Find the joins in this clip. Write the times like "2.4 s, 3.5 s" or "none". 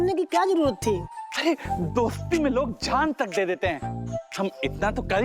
none